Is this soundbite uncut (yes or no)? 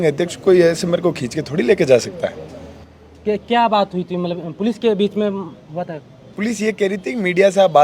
yes